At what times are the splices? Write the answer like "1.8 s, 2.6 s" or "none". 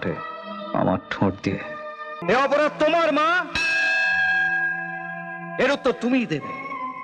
2.1 s